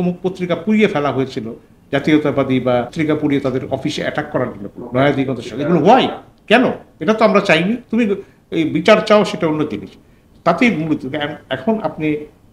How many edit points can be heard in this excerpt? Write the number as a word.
two